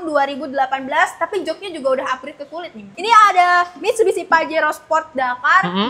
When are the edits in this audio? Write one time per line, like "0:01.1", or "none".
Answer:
0:02.9

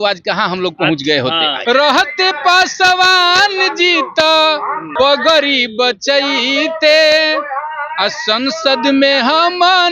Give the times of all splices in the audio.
0:01.6
0:04.9

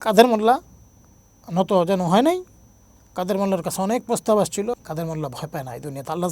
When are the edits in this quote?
0:04.8

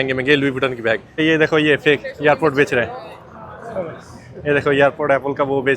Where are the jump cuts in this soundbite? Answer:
0:01.1

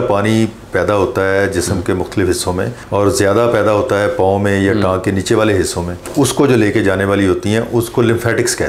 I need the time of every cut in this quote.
none

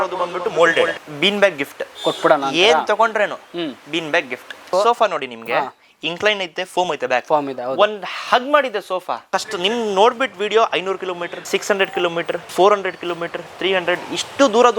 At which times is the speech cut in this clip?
0:00.9
0:04.7
0:09.2
0:11.3
0:12.5

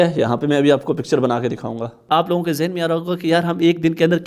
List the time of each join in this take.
0:02.0

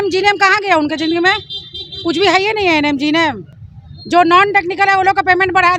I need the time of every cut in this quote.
none

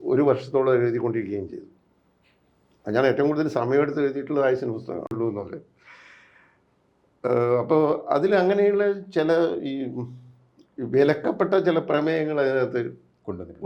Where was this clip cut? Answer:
0:05.1

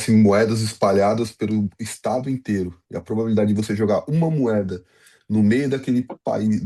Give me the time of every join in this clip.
none

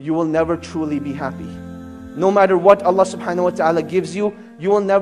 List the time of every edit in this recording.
none

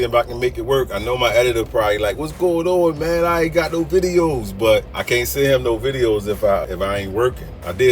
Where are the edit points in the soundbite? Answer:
0:04.9
0:06.6

